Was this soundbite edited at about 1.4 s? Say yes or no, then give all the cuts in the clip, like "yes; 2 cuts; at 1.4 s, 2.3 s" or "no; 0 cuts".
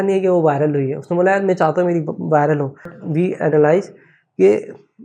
no; 1 cut; at 3.0 s